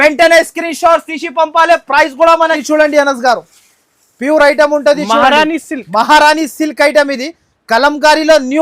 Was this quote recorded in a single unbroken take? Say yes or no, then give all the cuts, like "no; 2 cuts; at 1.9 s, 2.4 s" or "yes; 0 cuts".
no; 1 cut; at 2.6 s